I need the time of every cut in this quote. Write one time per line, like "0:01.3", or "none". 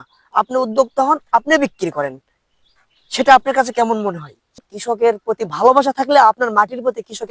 0:04.7